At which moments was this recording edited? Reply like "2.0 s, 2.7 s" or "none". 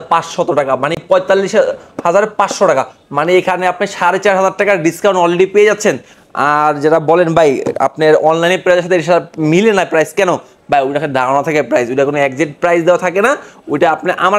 none